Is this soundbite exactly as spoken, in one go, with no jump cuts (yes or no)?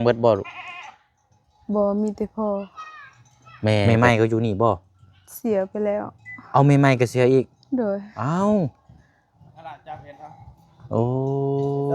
no